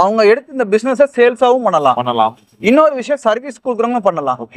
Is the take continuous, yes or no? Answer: yes